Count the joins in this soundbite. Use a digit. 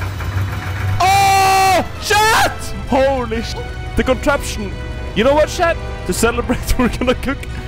1